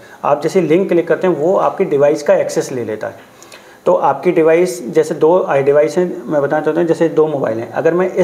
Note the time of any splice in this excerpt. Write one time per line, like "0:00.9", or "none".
none